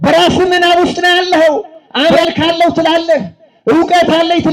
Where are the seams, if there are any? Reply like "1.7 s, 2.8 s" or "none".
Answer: 1.8 s